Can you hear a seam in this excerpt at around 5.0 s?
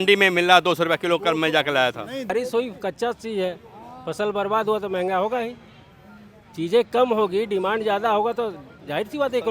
no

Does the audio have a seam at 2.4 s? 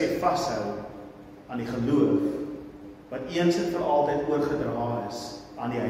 no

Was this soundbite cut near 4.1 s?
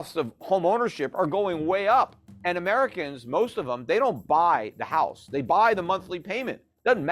no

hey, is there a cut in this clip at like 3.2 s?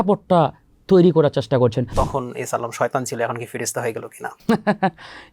no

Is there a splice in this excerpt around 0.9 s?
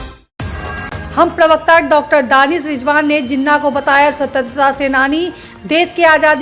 yes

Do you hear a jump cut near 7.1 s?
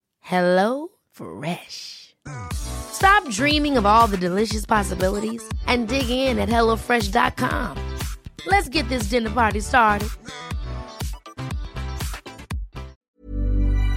no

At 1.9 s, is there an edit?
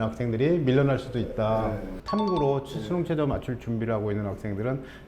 yes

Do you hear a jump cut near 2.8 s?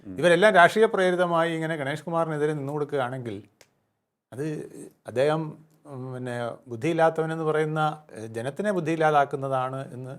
no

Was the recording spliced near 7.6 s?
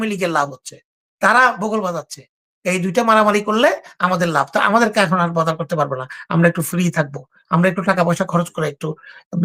no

